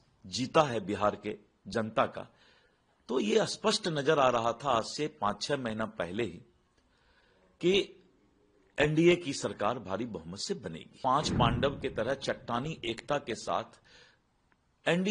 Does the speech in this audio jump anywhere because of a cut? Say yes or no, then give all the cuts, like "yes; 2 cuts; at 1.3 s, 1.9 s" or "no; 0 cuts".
yes; 1 cut; at 11.0 s